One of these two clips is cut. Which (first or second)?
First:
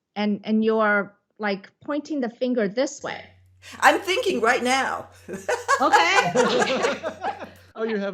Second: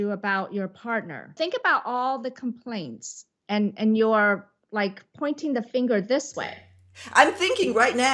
second